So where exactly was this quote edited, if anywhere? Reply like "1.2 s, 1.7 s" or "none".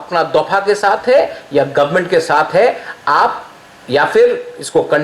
2.0 s

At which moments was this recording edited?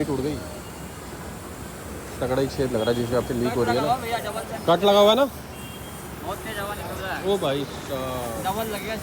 none

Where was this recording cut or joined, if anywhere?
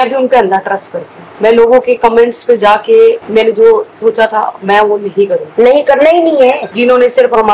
6.7 s

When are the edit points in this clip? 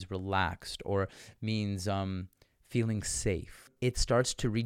3.7 s

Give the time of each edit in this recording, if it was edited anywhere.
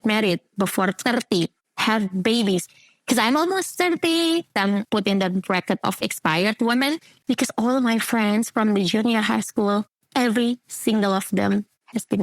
4.8 s, 6.0 s

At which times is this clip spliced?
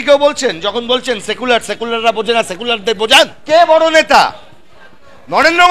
3.4 s

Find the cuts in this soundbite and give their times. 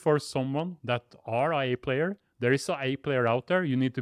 none

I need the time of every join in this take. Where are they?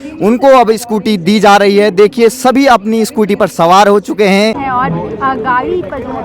4.6 s

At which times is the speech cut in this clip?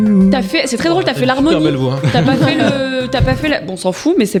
none

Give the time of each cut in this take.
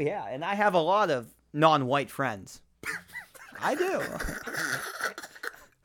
none

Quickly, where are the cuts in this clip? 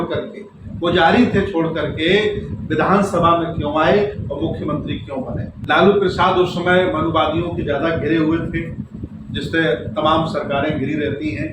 5.6 s

